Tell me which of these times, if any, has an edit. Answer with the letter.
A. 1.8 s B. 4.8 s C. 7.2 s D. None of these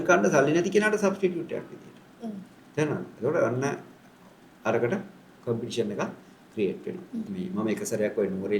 C